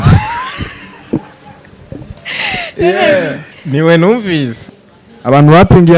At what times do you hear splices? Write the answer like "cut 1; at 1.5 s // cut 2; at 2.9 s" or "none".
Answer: cut 1; at 4.6 s